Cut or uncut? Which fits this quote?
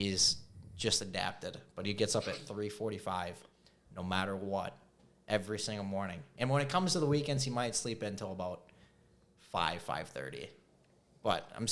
uncut